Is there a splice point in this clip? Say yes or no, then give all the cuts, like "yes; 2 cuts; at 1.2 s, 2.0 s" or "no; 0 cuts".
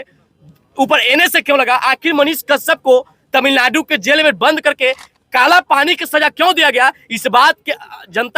no; 0 cuts